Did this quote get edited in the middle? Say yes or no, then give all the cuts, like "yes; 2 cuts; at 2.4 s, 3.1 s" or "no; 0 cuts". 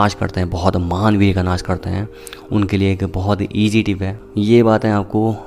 yes; 1 cut; at 4.1 s